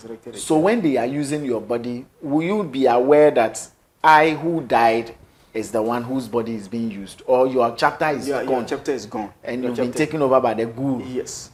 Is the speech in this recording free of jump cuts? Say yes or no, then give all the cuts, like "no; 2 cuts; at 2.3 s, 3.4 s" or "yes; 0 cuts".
yes; 0 cuts